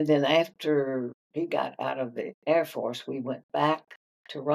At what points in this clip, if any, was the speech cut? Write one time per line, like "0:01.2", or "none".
0:01.2
0:02.3